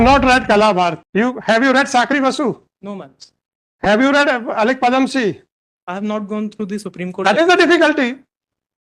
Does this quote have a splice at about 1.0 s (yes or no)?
yes